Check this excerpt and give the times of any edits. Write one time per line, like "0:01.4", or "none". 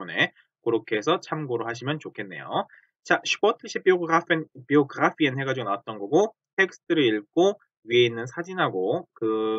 none

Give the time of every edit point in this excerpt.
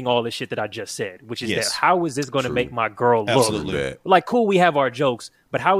none

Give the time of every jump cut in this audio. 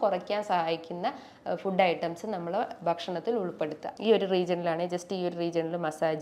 0:03.9

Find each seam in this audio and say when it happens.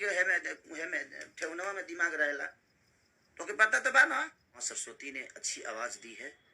0:04.6

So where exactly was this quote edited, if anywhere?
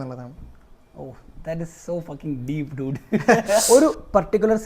0:03.6

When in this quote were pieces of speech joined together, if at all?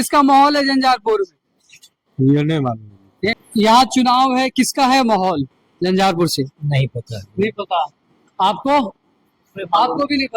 0:03.4

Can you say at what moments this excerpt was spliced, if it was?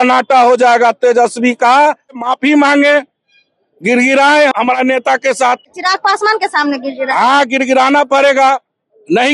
0:02.2
0:04.5
0:05.8

